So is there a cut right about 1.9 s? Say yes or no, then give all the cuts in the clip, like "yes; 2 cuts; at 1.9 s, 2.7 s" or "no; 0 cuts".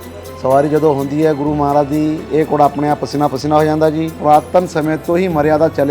no; 1 cut; at 4.2 s